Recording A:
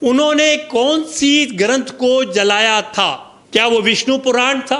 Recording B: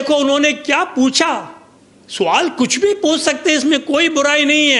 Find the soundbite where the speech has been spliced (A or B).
A